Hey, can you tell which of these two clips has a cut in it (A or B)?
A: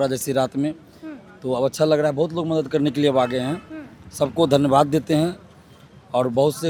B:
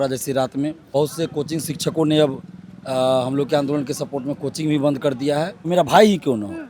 B